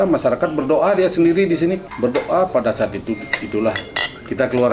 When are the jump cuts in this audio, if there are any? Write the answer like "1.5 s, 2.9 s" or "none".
1.8 s